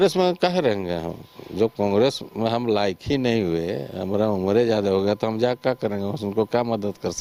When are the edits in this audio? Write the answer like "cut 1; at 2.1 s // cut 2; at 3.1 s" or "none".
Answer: none